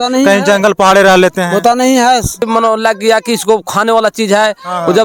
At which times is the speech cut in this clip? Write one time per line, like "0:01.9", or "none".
0:02.5